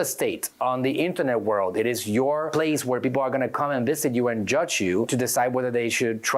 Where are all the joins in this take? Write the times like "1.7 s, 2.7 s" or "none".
2.5 s, 5.1 s